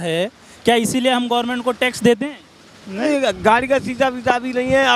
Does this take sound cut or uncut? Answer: cut